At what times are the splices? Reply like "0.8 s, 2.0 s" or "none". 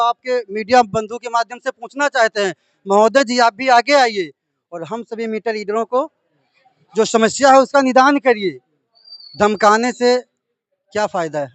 none